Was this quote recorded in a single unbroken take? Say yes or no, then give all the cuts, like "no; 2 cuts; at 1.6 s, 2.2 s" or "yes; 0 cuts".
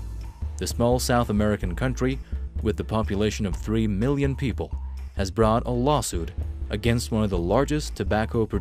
no; 1 cut; at 2.1 s